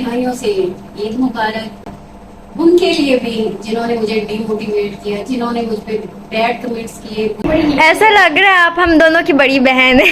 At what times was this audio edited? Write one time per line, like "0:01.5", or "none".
0:07.4

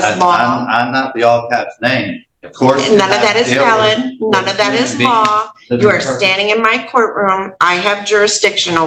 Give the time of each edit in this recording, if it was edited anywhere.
none

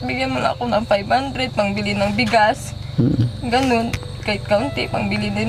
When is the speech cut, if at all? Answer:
none

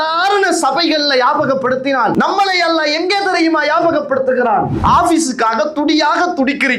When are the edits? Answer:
0:02.1
0:04.7

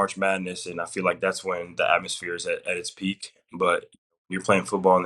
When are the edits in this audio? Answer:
none

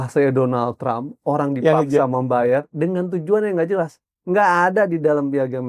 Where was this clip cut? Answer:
none

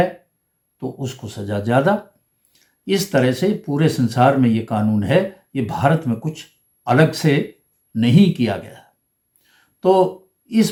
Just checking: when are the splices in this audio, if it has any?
none

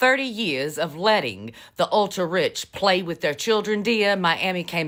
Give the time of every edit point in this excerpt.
none

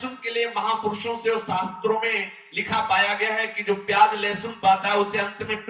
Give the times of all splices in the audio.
none

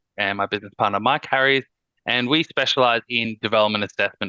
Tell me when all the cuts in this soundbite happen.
none

